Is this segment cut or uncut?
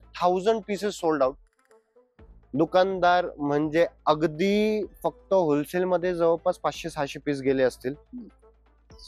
uncut